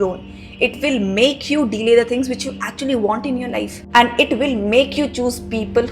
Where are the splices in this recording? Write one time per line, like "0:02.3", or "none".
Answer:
0:03.8